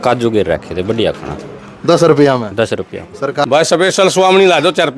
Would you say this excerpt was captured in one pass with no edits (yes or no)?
no